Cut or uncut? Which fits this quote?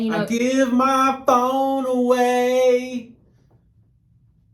uncut